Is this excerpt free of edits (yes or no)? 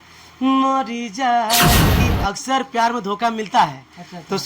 no